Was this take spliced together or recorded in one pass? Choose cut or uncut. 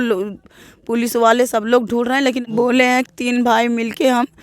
cut